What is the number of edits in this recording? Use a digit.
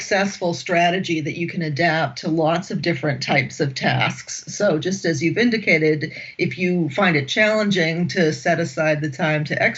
0